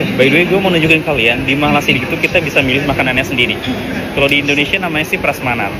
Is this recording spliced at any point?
no; 0 cuts

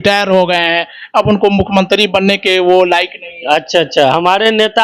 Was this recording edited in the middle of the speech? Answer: no; 0 cuts

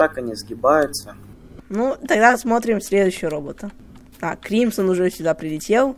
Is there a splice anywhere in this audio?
yes; 1 cut; at 1.6 s

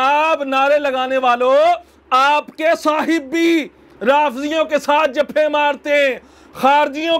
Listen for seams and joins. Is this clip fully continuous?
yes; 0 cuts

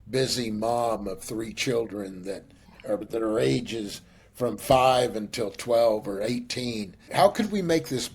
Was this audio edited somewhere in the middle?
yes; 2 cuts; at 3.0 s, 7.0 s

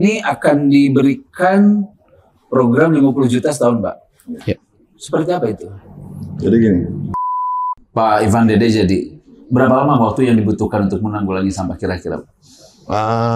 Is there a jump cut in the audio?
yes; 1 cut; at 7.6 s

